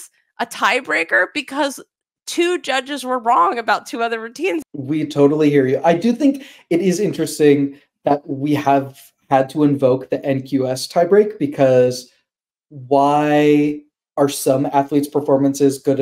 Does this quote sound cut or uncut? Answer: cut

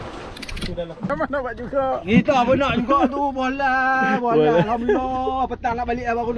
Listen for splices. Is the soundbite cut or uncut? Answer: cut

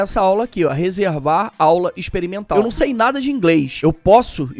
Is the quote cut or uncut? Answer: cut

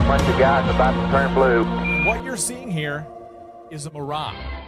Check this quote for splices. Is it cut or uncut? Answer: cut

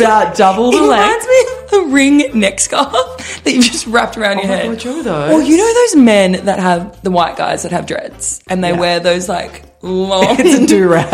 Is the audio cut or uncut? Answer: uncut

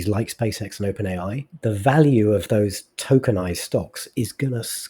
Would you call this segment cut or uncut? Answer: cut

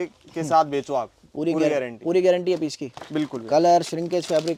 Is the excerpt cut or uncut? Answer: uncut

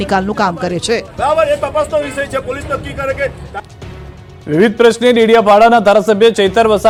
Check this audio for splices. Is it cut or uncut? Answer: uncut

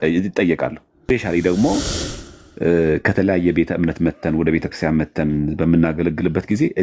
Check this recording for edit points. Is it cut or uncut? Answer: cut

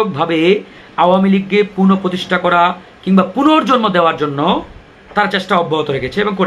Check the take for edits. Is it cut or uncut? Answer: uncut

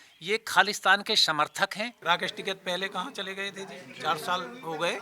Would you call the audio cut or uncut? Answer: cut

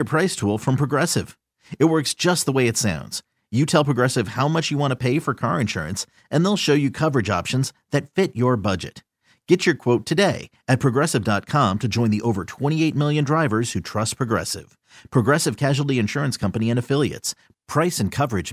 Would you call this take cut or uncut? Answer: uncut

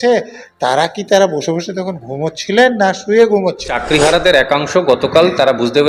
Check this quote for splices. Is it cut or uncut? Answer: cut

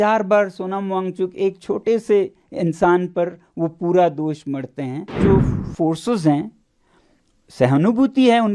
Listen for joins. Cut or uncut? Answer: cut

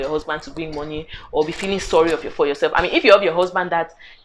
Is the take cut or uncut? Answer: uncut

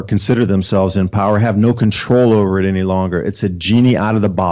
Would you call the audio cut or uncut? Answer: uncut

